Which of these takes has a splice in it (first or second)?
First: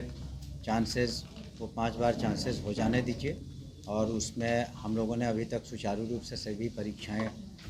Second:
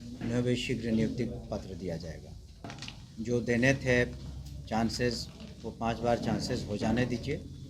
second